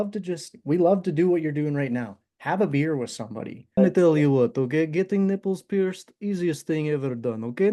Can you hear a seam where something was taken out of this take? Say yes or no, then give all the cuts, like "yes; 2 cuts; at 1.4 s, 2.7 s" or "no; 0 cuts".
yes; 1 cut; at 3.7 s